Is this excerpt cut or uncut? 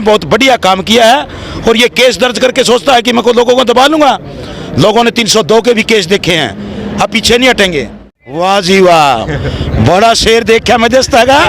cut